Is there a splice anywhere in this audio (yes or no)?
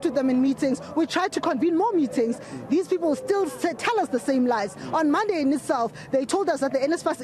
no